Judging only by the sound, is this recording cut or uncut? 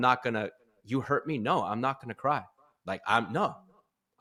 uncut